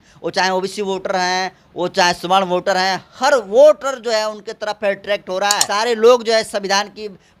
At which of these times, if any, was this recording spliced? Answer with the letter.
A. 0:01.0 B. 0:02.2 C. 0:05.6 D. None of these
C